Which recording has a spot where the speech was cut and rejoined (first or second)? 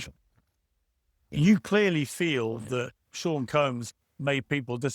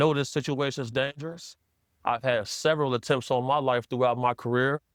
first